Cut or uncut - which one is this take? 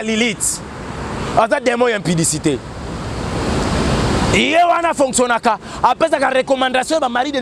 uncut